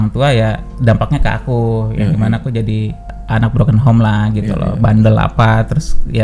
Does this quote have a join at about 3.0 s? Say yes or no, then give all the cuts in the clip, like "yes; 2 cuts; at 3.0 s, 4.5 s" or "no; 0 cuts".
yes; 1 cut; at 3.0 s